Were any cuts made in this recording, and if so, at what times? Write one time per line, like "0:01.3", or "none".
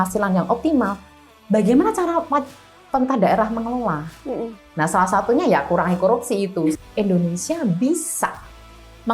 0:06.6